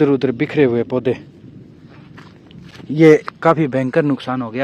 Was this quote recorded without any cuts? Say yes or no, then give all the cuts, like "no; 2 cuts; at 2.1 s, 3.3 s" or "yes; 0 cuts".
yes; 0 cuts